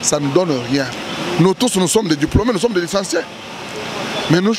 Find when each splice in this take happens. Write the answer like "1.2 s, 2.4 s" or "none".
0.9 s